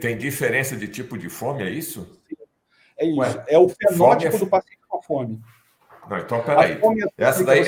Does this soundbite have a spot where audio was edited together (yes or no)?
no